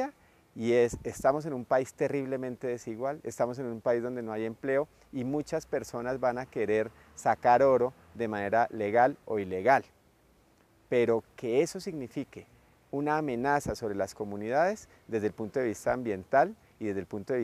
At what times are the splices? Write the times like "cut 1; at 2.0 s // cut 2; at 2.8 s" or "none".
cut 1; at 13.3 s